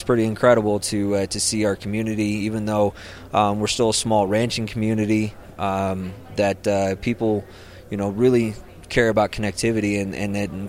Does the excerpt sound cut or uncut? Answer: uncut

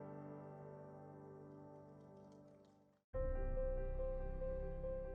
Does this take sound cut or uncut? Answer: cut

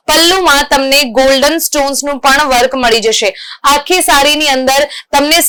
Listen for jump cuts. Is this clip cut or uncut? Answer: uncut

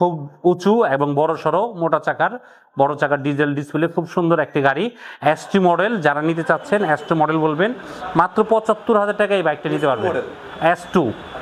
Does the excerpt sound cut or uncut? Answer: uncut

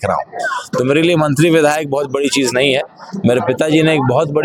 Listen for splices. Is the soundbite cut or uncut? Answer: uncut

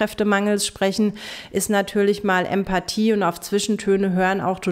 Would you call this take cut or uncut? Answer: uncut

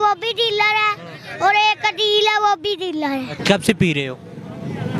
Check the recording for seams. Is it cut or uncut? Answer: uncut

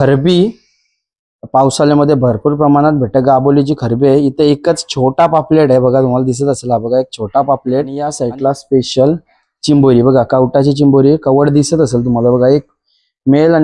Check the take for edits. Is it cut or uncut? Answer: cut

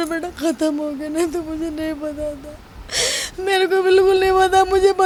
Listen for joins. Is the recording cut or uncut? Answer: uncut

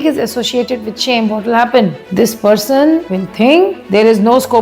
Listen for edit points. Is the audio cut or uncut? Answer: cut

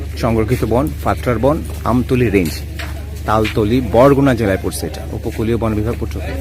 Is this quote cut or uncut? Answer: uncut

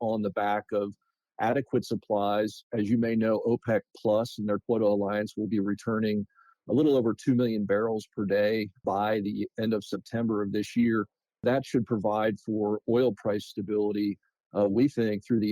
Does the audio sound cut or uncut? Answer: cut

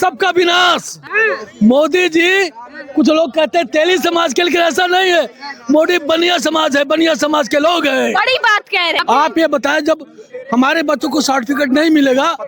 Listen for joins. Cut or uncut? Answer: cut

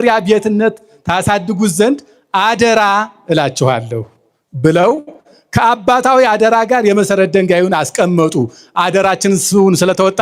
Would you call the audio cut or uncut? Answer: uncut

